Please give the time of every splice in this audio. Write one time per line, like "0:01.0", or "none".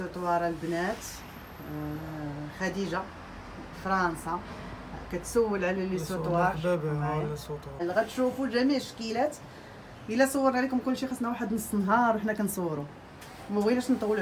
0:07.8